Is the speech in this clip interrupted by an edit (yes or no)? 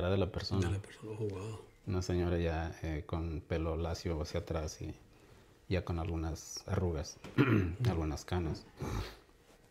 no